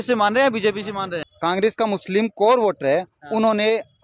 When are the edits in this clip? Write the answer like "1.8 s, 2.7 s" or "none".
1.1 s